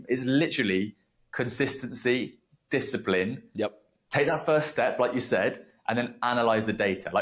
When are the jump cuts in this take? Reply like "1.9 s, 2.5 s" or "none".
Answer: none